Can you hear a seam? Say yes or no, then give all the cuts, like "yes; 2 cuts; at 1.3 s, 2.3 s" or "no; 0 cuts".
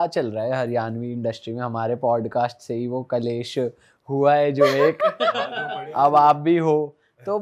yes; 1 cut; at 5.8 s